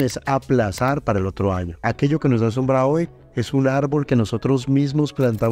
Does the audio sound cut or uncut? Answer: cut